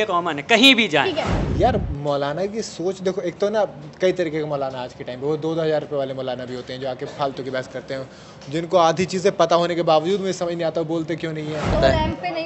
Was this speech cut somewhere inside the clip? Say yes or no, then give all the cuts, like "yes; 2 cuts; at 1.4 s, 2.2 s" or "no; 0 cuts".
yes; 2 cuts; at 1.4 s, 11.7 s